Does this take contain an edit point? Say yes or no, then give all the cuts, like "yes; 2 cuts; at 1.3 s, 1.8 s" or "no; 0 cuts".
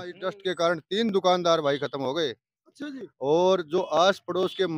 no; 0 cuts